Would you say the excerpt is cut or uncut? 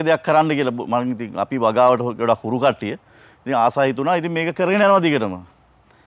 uncut